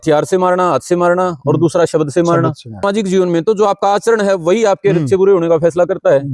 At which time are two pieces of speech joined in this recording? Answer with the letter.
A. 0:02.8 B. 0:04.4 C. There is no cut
A